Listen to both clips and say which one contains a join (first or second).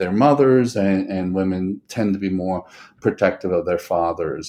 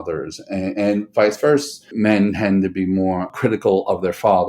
second